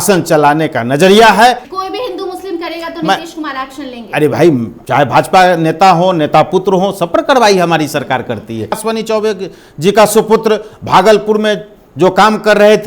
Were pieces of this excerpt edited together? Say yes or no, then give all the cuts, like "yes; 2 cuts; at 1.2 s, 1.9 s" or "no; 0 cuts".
yes; 3 cuts; at 1.7 s, 4.7 s, 8.8 s